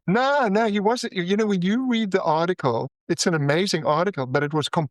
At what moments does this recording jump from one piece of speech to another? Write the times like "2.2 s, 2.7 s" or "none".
2.9 s

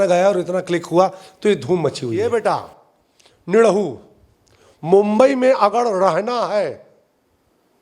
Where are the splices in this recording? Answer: 2.2 s

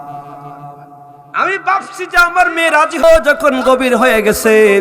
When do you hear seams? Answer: 3.0 s

